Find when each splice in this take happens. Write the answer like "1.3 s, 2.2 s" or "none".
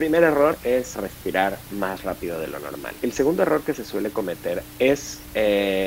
0.9 s, 2.9 s, 4.7 s

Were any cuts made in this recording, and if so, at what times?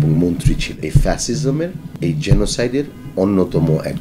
0.8 s, 1.8 s

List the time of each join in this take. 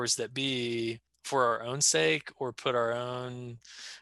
1.1 s

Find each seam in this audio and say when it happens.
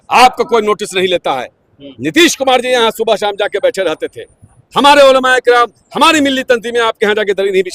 none

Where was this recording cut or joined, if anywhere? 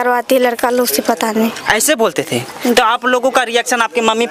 none

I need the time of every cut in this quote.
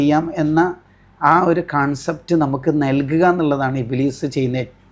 none

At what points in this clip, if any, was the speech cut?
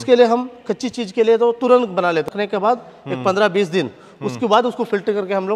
2.3 s

